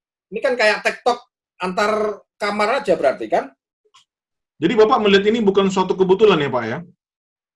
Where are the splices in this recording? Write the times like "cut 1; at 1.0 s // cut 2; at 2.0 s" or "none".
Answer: none